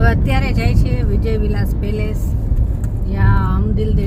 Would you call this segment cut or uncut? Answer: uncut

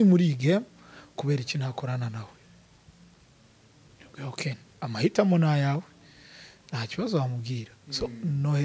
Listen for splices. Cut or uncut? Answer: uncut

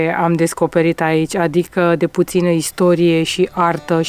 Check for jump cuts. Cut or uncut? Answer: uncut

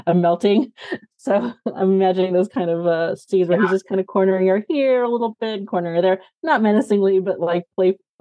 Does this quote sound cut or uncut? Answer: uncut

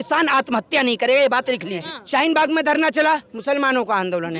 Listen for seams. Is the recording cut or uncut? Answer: cut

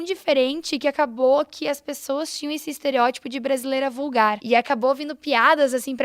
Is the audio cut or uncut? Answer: cut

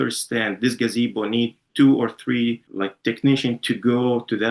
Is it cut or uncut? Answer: uncut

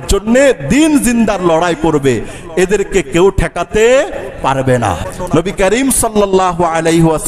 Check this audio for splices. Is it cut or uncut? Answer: cut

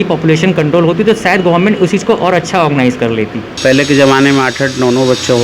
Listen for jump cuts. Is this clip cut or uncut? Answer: cut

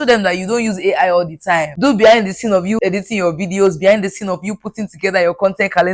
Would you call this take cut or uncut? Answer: cut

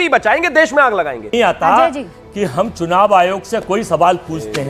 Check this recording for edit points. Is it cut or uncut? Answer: cut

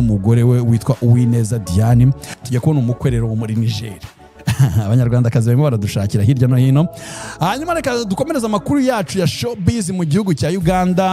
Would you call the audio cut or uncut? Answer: cut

